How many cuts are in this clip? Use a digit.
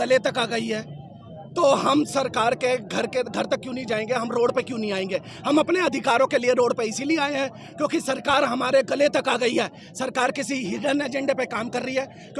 0